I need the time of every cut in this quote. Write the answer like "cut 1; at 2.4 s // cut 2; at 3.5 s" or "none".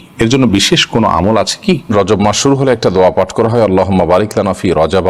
cut 1; at 1.9 s

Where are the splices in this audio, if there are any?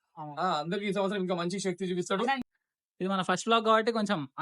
cut 1; at 2.5 s

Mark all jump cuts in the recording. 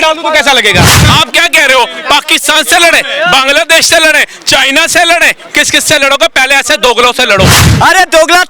cut 1; at 1.0 s // cut 2; at 7.6 s

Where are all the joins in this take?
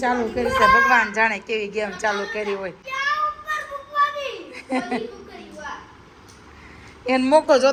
none

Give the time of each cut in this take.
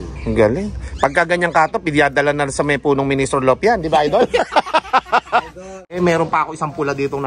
cut 1; at 5.8 s

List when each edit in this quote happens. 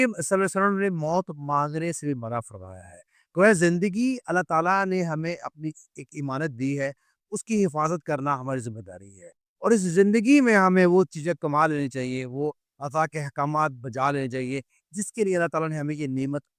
none

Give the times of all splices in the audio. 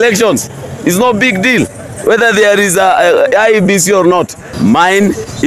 cut 1; at 4.4 s

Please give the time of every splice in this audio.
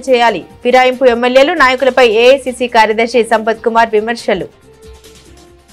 cut 1; at 4.6 s

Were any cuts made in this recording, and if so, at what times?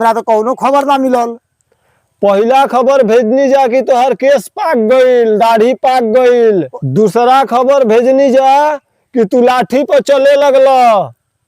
cut 1; at 6.7 s

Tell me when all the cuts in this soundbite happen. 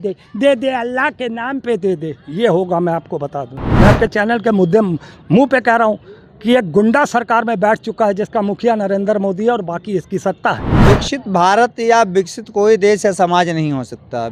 cut 1; at 3.6 s // cut 2; at 10.7 s

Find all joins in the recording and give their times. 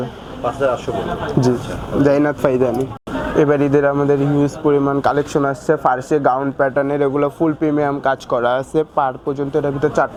none

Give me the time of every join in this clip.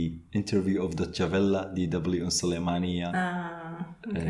none

